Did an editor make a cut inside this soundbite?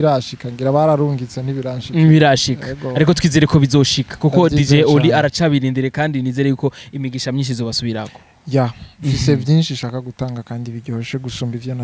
no; 0 cuts

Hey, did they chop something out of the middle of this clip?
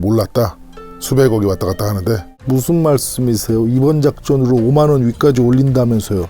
yes; 1 cut; at 2.3 s

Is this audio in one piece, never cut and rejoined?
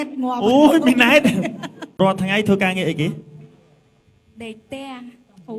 no; 1 cut; at 1.8 s

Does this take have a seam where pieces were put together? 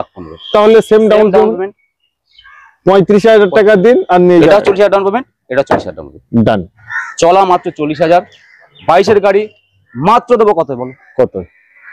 yes; 2 cuts; at 4.5 s, 6.8 s

